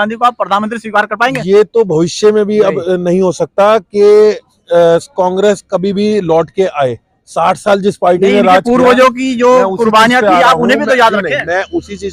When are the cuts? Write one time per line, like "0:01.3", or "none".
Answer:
none